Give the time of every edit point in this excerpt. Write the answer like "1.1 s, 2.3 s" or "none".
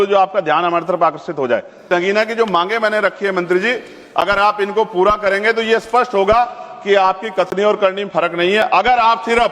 1.8 s